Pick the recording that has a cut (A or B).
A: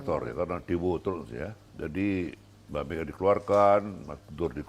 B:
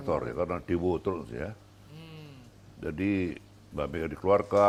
A